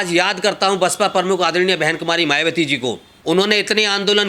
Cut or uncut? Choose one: cut